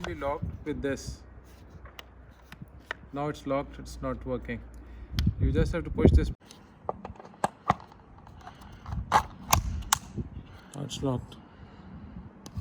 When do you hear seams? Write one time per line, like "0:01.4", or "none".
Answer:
0:06.4

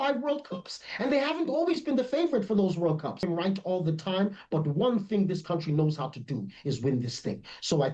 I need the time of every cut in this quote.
0:03.2

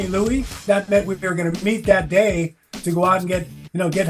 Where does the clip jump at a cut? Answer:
none

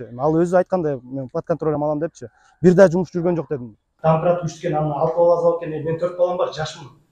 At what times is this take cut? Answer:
0:03.9

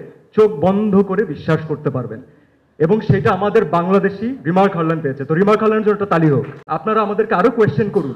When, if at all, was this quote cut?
0:06.6

